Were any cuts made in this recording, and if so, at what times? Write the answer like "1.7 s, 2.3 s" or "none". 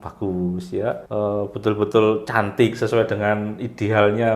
1.0 s